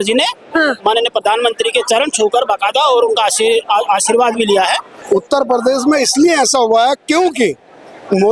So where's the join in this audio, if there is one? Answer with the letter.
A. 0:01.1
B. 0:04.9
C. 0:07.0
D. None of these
B